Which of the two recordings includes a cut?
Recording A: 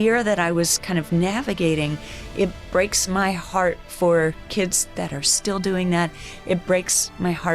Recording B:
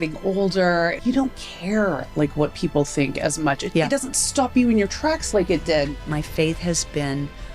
B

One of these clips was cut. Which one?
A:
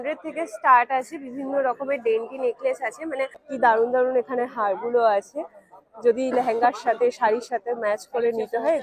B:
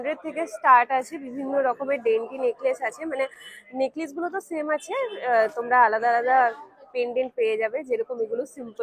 A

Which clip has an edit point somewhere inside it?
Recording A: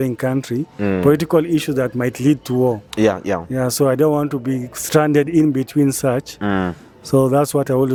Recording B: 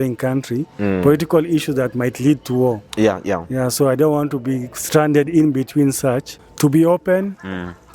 B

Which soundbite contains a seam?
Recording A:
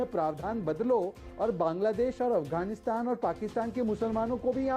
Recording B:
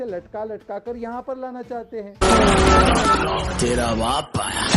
B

